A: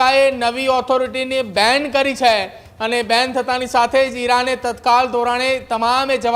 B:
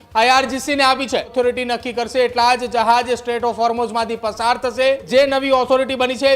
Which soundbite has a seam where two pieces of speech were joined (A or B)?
B